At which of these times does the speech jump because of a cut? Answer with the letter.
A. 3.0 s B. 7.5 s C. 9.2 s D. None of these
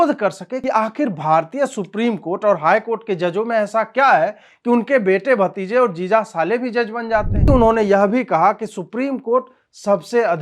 B